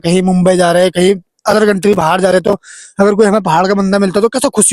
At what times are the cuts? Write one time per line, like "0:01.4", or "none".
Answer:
none